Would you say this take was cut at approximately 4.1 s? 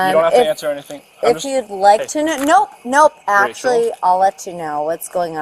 no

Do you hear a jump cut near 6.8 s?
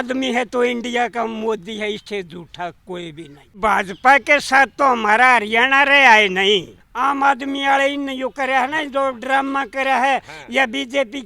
yes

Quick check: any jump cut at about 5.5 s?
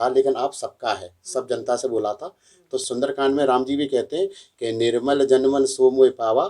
no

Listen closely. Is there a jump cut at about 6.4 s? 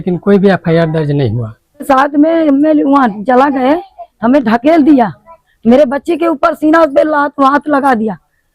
no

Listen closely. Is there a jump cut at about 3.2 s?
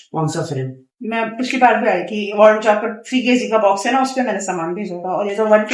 no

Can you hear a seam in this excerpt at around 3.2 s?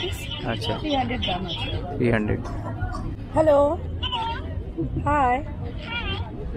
yes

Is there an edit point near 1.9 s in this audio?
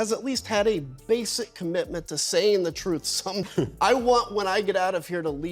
no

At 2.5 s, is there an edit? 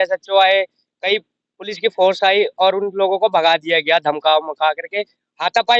no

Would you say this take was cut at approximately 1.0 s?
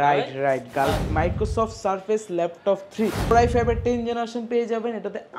yes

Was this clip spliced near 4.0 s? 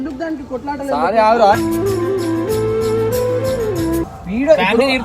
yes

